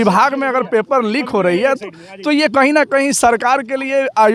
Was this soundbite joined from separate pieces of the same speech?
no; 0 cuts

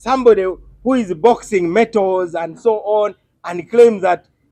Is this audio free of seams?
yes; 0 cuts

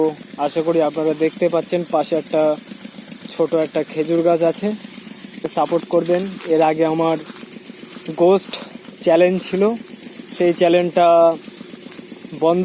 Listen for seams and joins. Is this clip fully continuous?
no; 1 cut; at 5.5 s

